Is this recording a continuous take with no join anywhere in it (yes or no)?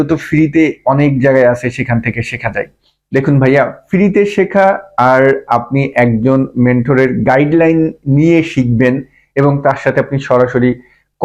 yes